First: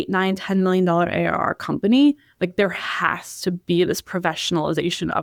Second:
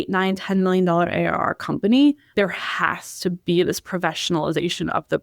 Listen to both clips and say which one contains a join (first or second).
second